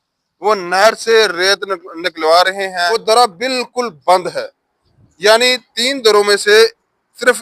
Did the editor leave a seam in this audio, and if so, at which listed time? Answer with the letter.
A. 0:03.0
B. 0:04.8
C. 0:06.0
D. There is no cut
A